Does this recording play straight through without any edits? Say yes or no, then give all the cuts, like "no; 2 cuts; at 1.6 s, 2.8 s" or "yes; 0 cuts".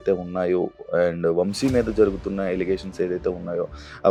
yes; 0 cuts